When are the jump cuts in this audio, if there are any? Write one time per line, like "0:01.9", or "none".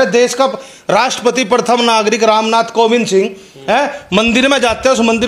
none